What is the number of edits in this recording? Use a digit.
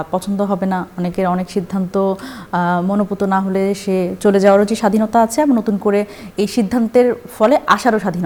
0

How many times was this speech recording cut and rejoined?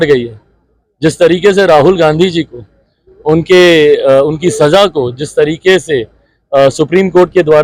0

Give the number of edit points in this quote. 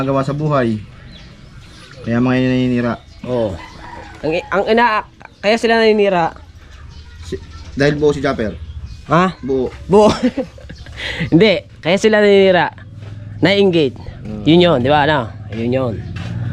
0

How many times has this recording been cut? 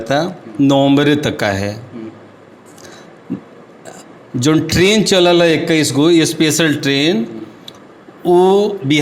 0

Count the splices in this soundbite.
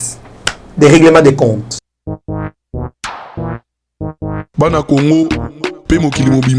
1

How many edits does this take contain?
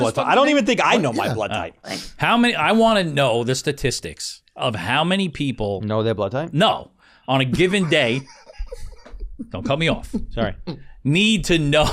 1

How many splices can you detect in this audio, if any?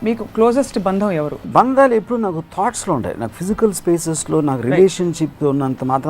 1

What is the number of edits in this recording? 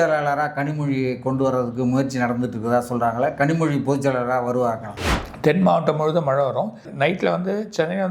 2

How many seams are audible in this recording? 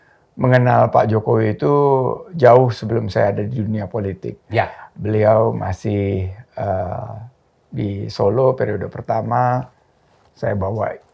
0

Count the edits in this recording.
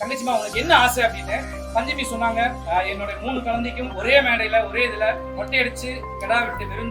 3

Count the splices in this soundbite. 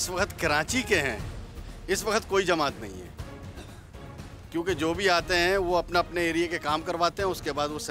0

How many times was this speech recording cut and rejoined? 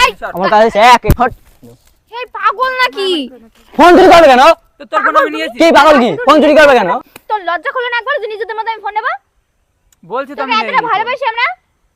2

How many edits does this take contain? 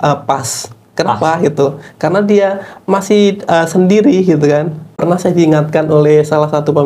1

